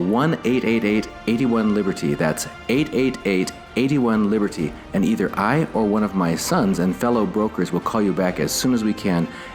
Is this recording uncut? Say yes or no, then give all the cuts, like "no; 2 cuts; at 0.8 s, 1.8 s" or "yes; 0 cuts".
yes; 0 cuts